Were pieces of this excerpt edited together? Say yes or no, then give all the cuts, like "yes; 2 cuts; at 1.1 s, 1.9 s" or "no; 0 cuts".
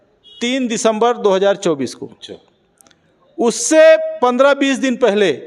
no; 0 cuts